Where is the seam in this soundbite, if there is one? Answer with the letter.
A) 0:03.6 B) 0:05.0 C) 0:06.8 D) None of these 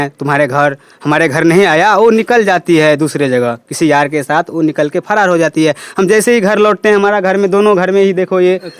D